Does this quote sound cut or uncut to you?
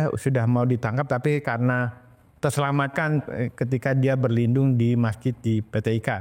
uncut